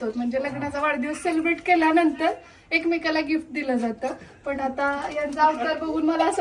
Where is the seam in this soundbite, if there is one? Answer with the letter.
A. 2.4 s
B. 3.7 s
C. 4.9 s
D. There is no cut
D